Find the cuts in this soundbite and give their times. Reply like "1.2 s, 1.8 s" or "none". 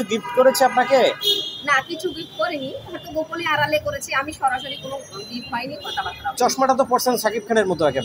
none